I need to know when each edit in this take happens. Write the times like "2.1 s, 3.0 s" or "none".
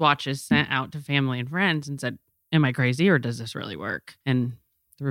4.1 s